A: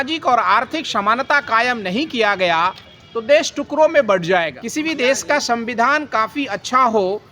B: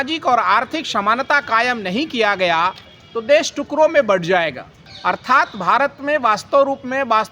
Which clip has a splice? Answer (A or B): A